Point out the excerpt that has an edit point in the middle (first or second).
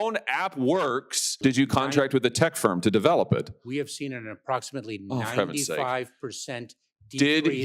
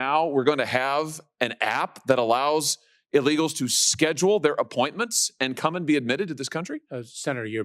first